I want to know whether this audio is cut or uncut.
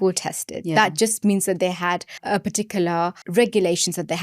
cut